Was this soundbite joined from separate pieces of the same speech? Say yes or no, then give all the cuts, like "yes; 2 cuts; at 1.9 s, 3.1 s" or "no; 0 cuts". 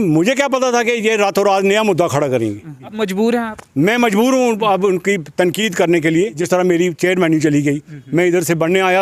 yes; 2 cuts; at 2.9 s, 6.4 s